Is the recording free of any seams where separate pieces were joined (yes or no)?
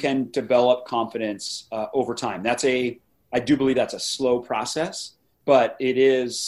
no